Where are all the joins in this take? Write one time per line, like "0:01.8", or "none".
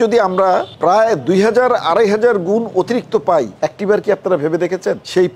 none